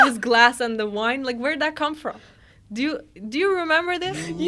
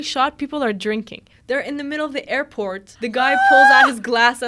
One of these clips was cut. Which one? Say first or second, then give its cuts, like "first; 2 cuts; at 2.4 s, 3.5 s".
second; 2 cuts; at 1.3 s, 2.9 s